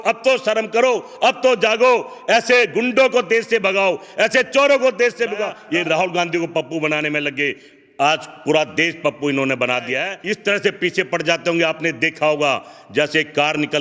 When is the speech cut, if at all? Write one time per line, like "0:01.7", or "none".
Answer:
0:05.6
0:10.1